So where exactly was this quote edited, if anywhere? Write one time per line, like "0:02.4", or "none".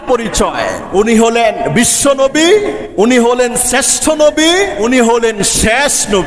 0:00.8
0:02.8
0:04.8